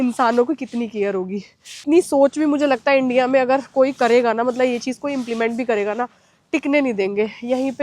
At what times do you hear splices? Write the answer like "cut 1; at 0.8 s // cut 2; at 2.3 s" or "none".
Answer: cut 1; at 1.8 s